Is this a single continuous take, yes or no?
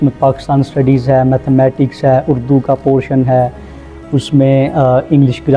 yes